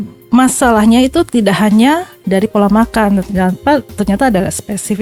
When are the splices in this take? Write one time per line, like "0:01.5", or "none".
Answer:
none